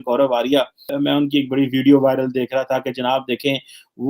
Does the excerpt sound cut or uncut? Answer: cut